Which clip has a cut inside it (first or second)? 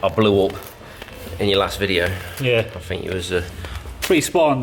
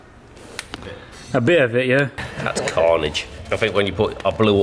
second